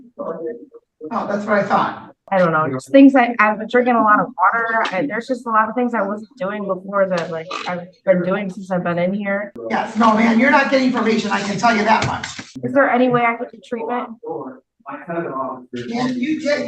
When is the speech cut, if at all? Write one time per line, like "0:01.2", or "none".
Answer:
0:02.2
0:09.5
0:12.5